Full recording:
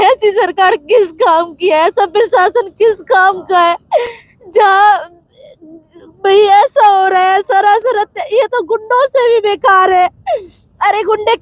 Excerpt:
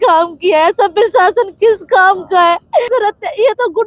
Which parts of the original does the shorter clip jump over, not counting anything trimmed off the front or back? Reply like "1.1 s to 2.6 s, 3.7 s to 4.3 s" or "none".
4.1 s to 7.8 s